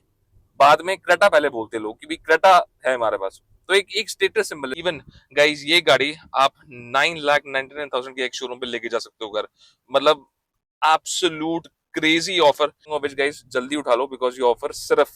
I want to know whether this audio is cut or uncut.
cut